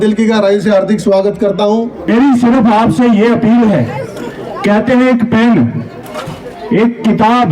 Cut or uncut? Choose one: cut